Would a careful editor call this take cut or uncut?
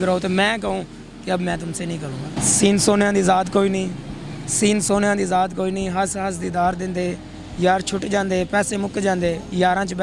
cut